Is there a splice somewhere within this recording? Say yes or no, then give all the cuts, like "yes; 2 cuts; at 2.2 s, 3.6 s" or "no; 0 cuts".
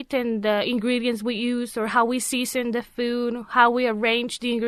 no; 0 cuts